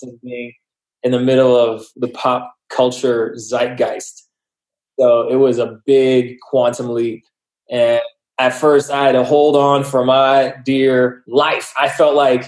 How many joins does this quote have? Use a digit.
1